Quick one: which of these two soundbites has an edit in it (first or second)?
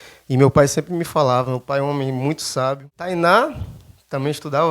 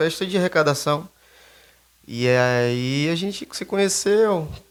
first